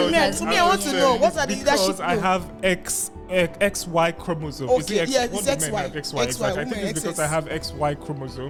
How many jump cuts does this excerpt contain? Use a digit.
0